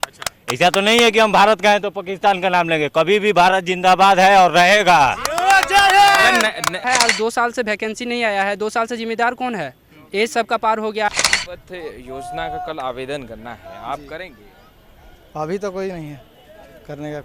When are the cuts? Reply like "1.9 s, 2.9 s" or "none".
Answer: 6.8 s, 11.1 s